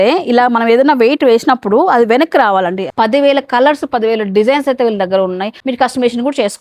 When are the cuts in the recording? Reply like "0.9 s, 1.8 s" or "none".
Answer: 2.8 s, 5.5 s